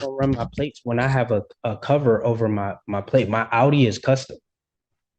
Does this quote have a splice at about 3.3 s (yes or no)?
no